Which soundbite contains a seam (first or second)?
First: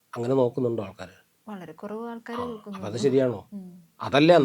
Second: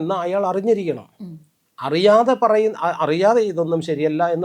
first